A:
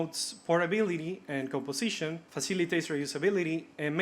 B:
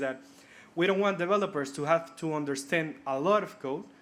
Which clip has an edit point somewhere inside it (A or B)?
A